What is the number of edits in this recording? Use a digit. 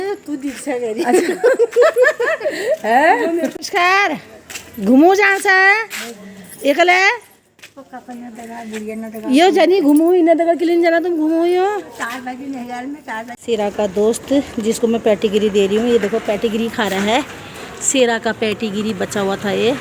2